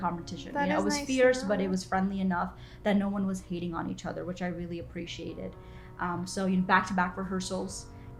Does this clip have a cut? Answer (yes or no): no